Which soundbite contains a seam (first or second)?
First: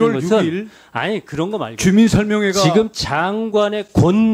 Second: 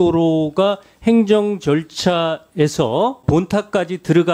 second